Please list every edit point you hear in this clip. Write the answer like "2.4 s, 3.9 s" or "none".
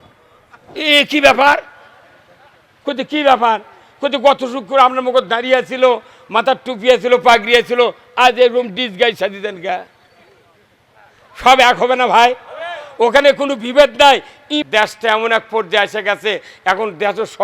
14.5 s